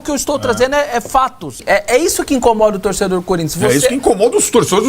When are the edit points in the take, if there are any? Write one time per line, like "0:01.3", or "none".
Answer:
0:01.5